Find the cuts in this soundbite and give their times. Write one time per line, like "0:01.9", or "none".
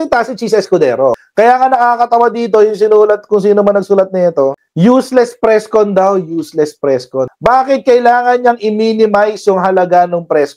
none